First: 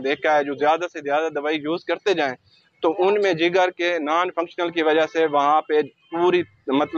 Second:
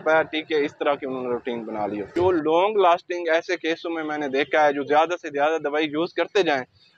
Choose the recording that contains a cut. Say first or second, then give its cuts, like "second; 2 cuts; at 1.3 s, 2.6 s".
second; 1 cut; at 2.1 s